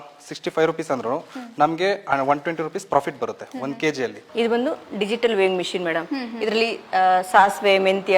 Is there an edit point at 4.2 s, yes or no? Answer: yes